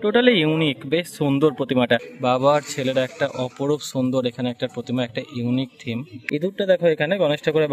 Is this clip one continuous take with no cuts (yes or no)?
no